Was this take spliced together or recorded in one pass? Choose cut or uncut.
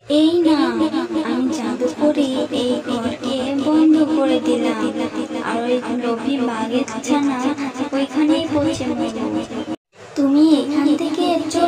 uncut